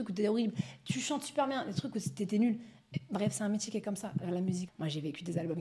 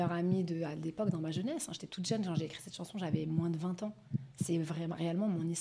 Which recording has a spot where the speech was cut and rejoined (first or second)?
first